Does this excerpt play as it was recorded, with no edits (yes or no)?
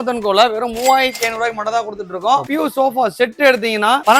no